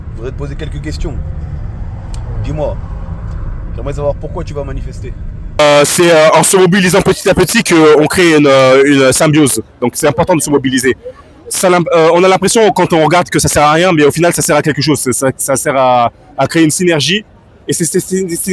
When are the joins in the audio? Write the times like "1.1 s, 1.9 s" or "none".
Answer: 5.6 s